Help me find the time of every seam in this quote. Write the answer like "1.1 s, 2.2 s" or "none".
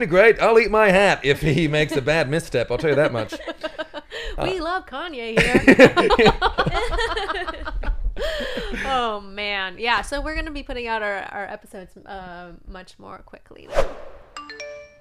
13.6 s